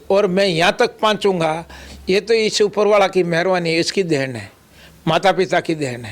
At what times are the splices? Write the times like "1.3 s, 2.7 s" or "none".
none